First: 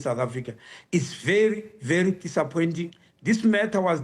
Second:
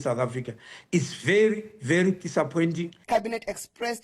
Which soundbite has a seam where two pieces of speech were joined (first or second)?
second